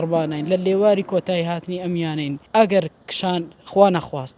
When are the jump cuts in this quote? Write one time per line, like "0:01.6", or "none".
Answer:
0:02.4

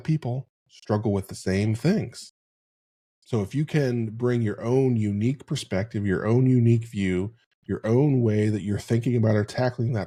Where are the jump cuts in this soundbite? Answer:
none

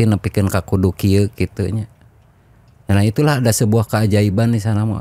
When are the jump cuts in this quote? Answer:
none

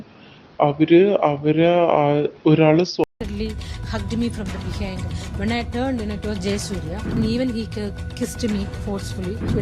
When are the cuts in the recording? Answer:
0:03.0

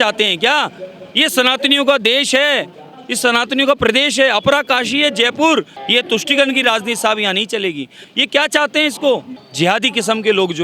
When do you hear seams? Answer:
0:05.8
0:08.1
0:09.4

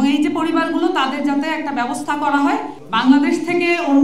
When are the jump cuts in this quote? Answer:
0:02.8

